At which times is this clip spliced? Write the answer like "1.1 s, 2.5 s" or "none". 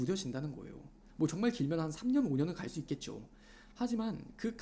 1.0 s